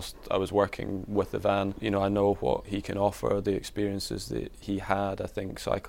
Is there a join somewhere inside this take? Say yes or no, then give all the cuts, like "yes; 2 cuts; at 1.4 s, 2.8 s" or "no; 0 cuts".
yes; 3 cuts; at 1.8 s, 2.7 s, 4.6 s